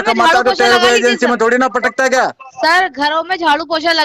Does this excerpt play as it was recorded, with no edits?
yes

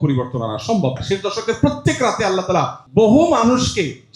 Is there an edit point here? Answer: yes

